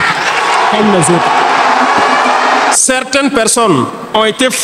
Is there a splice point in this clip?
yes; 1 cut; at 2.8 s

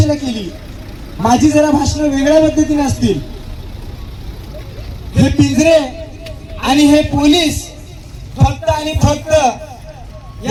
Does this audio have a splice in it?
no; 0 cuts

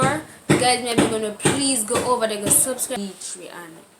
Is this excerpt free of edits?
no; 1 cut; at 3.0 s

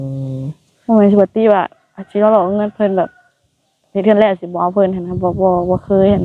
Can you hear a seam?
no; 0 cuts

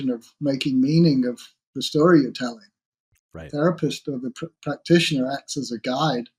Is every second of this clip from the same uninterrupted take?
yes; 0 cuts

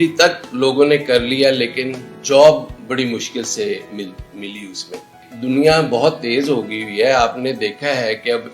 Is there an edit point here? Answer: yes; 2 cuts; at 2.1 s, 5.3 s

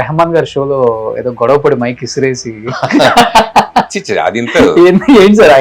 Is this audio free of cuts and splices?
yes; 0 cuts

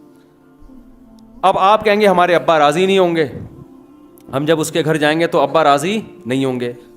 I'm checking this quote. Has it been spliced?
yes; 1 cut; at 0.9 s

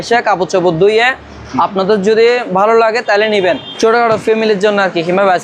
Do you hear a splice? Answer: yes; 1 cut; at 3.7 s

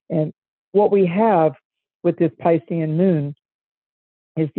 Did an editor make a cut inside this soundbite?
no; 0 cuts

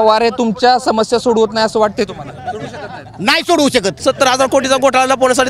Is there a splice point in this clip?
yes; 1 cut; at 3.9 s

